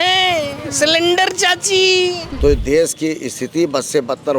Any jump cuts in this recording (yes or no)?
yes